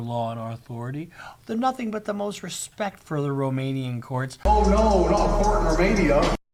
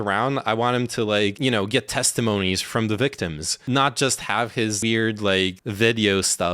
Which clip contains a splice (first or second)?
second